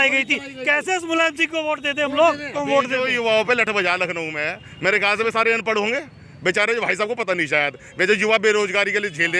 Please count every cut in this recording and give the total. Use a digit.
1